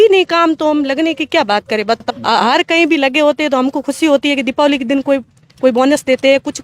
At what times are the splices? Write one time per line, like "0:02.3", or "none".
0:02.1

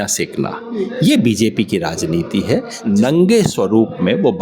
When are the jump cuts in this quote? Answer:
0:02.7

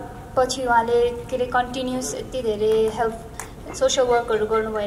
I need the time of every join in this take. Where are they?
none

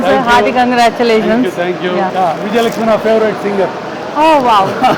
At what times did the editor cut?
0:02.1

